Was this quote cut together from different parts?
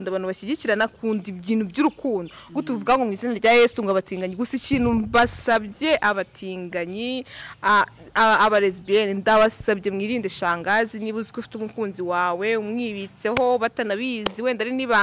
no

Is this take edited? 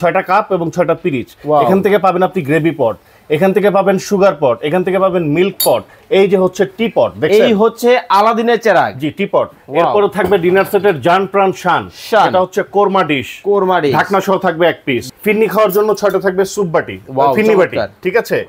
yes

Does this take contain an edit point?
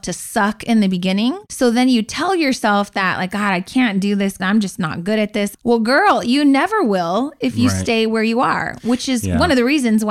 yes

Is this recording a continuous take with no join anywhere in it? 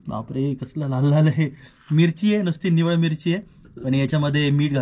yes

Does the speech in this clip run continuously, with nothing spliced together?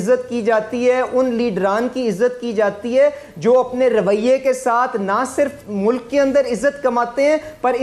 yes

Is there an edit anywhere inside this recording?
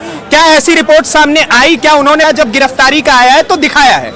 yes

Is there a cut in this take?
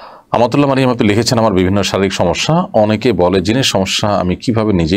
no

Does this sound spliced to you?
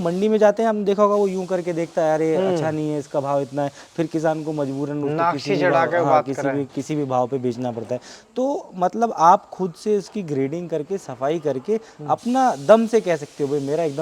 no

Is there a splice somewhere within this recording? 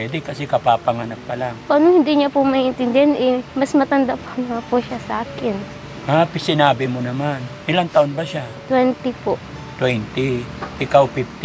no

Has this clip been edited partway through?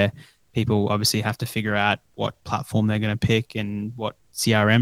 yes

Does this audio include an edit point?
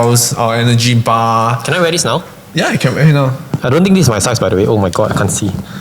yes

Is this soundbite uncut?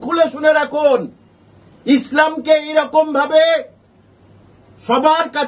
yes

